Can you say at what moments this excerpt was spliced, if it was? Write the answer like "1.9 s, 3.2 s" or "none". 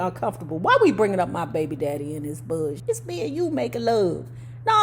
2.8 s

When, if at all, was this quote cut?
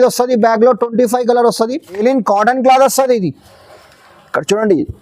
2.0 s

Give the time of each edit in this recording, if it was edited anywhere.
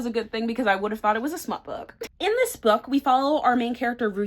none

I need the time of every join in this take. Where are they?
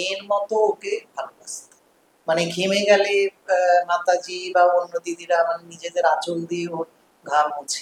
none

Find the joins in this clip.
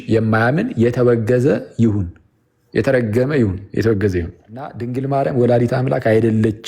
4.9 s

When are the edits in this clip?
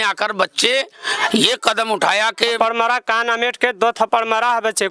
2.6 s

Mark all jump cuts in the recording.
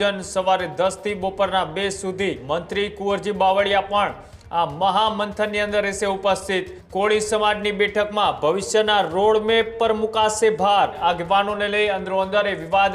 2.4 s, 6.8 s, 11.0 s

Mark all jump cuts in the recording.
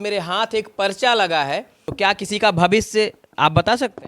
1.8 s

